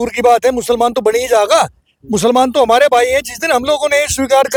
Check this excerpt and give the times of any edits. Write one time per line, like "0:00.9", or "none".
none